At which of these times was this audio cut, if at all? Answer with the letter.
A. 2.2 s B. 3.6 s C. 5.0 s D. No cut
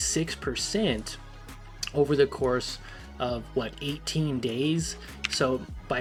D